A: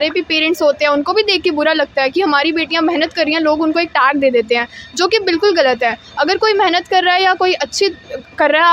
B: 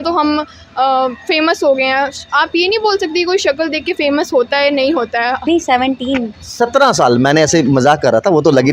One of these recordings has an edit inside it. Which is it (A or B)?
B